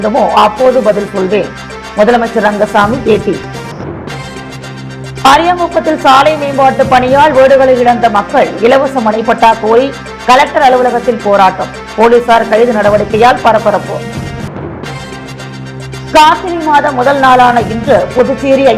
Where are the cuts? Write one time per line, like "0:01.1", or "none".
none

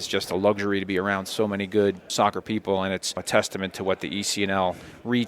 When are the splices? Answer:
0:02.1
0:03.2

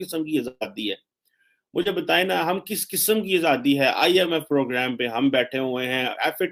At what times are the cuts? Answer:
none

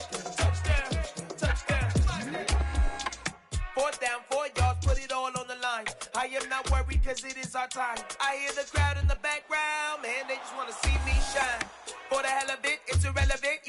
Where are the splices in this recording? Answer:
0:03.3

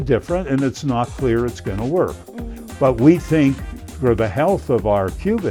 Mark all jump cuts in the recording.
none

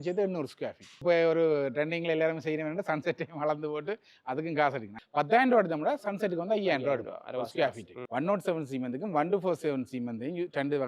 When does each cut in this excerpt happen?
0:01.0
0:05.0
0:08.0

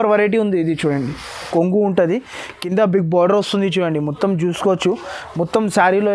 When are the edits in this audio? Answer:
0:01.5

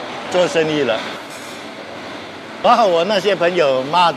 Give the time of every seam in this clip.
none

